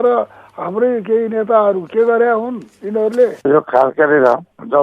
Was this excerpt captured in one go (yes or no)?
no